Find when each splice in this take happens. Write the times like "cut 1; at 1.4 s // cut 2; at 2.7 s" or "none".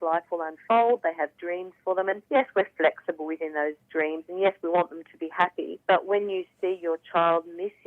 cut 1; at 2.2 s // cut 2; at 5.7 s